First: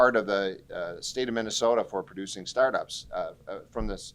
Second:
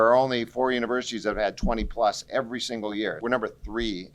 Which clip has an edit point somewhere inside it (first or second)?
second